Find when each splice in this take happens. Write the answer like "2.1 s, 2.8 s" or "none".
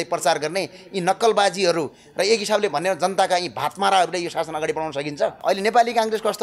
5.4 s